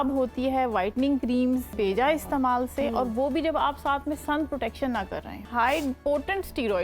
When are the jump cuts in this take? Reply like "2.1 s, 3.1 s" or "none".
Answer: 1.7 s, 5.5 s